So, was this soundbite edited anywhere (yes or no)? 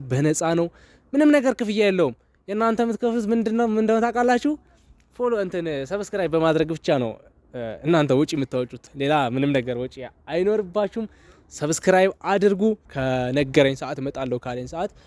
yes